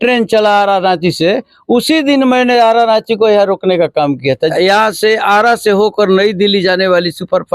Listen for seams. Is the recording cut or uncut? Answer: cut